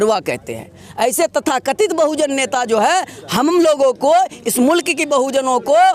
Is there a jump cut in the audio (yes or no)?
no